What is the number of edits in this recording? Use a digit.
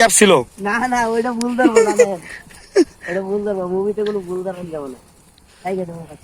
0